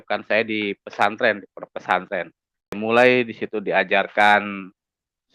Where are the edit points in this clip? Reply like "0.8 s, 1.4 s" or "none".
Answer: 2.8 s